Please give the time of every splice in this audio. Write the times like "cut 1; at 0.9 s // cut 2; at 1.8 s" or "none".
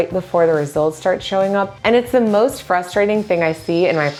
none